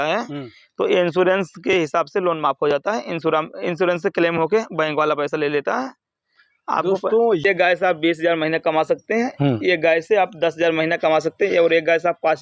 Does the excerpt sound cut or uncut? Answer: cut